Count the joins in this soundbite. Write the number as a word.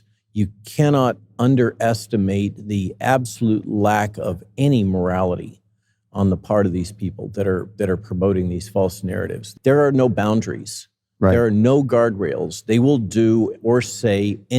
one